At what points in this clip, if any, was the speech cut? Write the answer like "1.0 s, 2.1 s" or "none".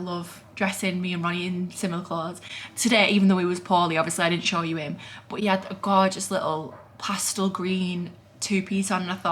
none